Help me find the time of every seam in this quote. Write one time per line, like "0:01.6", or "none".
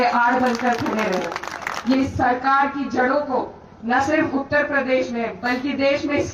0:02.0

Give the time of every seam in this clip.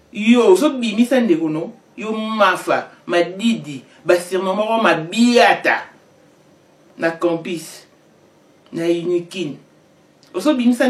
none

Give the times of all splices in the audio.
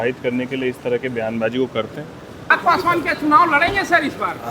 0:02.6

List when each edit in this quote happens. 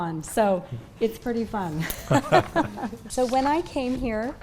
0:03.0

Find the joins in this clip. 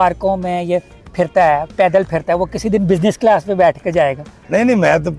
none

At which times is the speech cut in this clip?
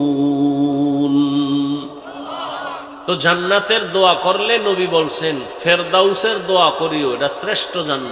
0:02.9

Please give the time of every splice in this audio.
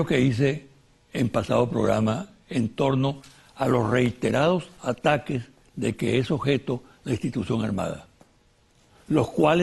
none

